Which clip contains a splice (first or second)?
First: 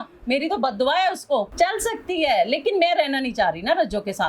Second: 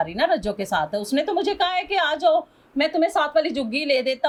first